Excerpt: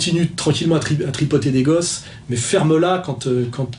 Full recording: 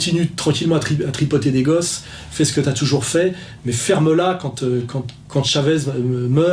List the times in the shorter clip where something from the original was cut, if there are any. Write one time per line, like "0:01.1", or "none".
0:02.2